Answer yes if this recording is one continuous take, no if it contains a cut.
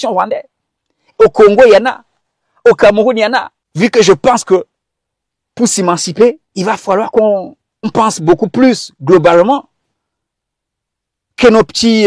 no